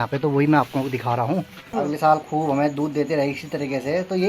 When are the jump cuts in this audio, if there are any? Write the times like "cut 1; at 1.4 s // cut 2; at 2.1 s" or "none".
cut 1; at 1.7 s